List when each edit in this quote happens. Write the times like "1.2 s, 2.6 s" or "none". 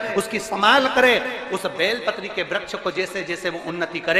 none